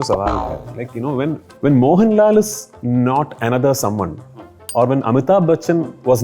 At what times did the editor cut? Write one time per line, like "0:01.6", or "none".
0:01.5